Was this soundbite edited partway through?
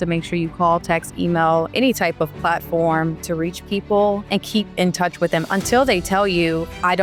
no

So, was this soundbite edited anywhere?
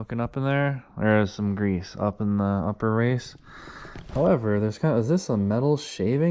no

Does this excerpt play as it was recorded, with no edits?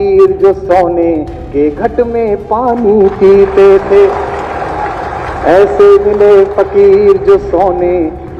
yes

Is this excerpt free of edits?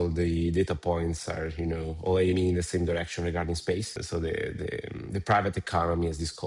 no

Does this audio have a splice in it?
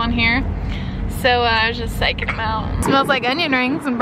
yes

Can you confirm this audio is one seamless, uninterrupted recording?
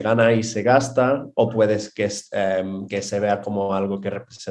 yes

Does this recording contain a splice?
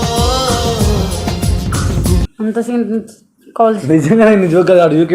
yes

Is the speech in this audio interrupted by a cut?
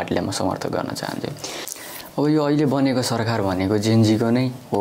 yes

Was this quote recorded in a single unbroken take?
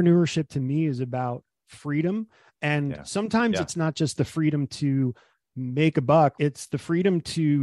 no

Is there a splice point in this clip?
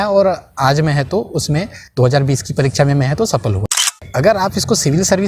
yes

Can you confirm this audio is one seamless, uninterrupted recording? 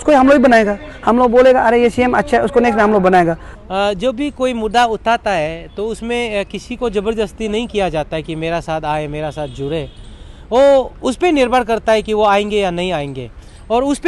no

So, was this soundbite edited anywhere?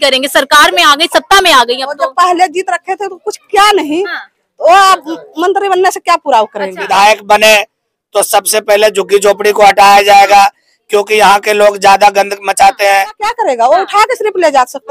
yes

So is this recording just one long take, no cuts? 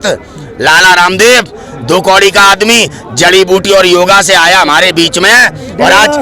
yes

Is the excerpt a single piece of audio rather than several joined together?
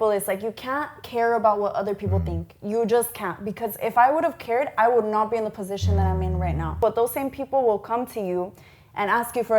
no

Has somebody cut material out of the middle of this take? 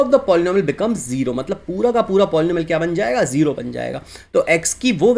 no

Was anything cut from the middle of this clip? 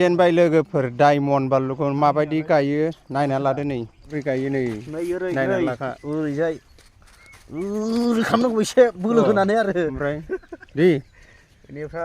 yes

